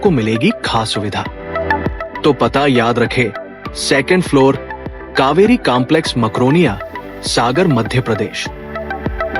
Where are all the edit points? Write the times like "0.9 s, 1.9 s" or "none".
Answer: 2.0 s, 8.4 s